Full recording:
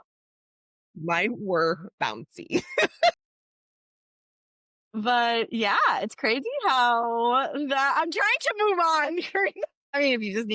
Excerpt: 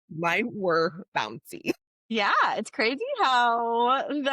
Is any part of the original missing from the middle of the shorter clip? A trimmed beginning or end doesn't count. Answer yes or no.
yes